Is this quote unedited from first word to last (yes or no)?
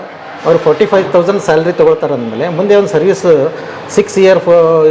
yes